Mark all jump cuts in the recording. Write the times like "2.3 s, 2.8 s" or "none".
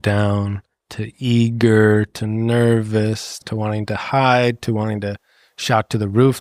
3.4 s